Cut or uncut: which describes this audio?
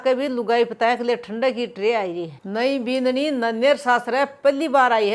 cut